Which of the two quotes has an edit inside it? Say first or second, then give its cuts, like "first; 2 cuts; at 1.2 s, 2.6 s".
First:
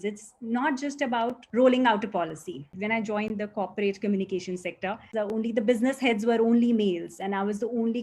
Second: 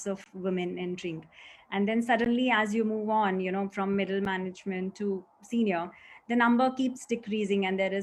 first; 3 cuts; at 1.4 s, 2.7 s, 5.1 s